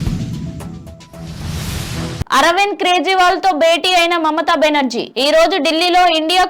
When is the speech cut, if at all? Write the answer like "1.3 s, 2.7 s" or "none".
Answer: 1.4 s